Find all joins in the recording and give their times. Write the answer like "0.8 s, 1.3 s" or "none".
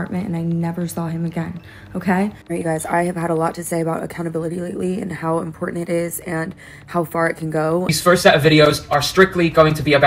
2.4 s, 7.9 s